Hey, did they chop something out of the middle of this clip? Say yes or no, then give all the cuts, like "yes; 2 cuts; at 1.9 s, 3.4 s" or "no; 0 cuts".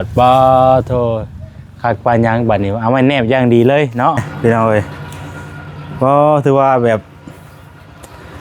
yes; 1 cut; at 4.3 s